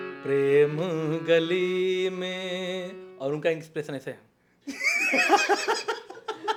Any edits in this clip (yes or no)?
no